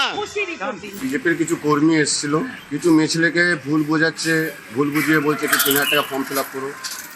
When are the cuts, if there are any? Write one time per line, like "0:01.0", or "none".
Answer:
0:01.0